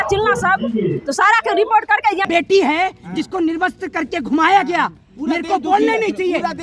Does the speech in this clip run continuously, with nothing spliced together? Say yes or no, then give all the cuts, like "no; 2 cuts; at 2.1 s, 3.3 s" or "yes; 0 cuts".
no; 1 cut; at 2.2 s